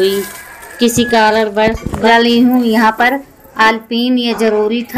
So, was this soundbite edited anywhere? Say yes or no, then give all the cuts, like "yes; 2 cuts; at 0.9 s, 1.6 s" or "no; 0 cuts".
yes; 1 cut; at 2.1 s